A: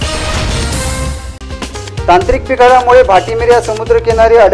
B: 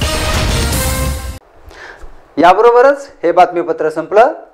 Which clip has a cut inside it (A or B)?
A